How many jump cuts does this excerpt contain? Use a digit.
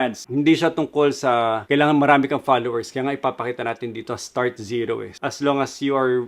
1